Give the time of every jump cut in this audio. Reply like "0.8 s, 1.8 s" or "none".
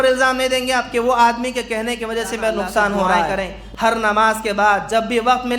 3.3 s